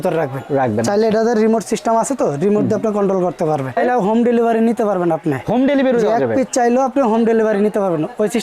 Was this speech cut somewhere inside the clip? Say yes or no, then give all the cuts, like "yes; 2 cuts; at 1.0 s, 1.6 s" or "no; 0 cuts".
yes; 1 cut; at 3.8 s